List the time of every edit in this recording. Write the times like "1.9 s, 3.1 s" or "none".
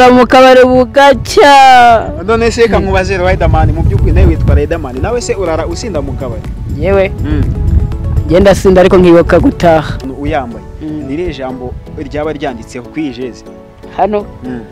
10.0 s